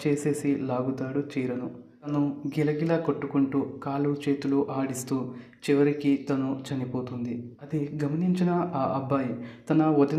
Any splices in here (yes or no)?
yes